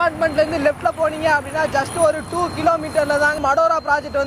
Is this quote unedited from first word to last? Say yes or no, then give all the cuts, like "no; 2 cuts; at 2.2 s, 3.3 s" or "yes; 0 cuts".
no; 1 cut; at 3.4 s